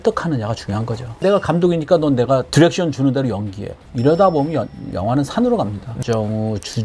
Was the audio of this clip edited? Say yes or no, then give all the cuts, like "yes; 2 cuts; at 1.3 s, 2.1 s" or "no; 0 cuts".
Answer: yes; 2 cuts; at 1.2 s, 5.9 s